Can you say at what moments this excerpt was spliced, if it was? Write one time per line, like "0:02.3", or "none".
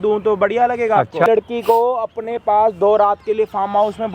0:01.3